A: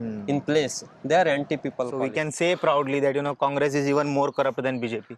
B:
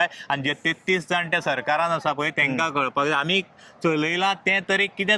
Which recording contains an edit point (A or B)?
A